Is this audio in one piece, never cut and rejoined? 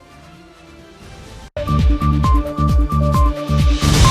no; 1 cut; at 1.4 s

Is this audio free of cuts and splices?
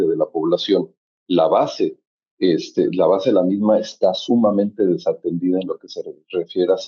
yes; 0 cuts

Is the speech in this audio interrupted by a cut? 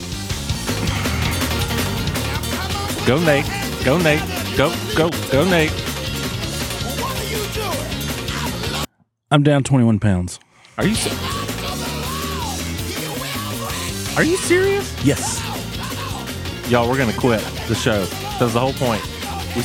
no; 0 cuts

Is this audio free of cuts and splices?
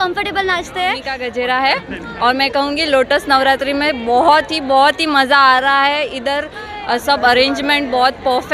no; 1 cut; at 1.2 s

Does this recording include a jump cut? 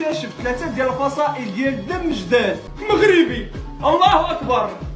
yes; 1 cut; at 2.7 s

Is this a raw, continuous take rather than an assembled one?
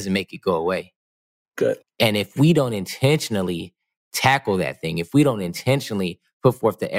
no; 1 cut; at 1.9 s

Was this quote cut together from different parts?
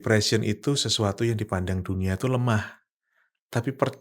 no; 0 cuts

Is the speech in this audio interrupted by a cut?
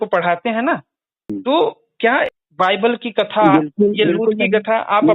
yes; 2 cuts; at 1.3 s, 2.4 s

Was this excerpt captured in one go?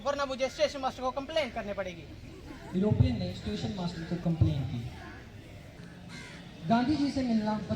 no; 1 cut; at 5.7 s

